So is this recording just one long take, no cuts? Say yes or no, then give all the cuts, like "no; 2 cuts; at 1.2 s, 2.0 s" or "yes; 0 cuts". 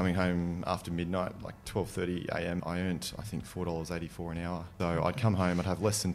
no; 2 cuts; at 2.6 s, 4.7 s